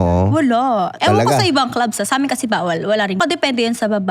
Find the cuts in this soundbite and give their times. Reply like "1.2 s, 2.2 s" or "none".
1.0 s, 3.2 s